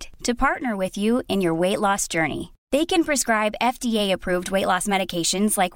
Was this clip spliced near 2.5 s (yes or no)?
no